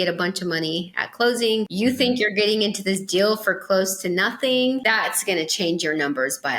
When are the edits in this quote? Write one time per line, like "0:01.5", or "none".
0:01.7
0:04.8